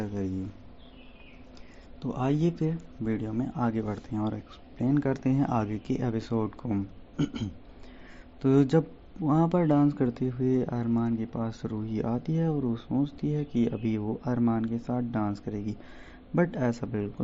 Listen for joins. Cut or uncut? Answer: uncut